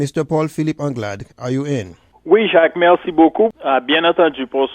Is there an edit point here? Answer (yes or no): yes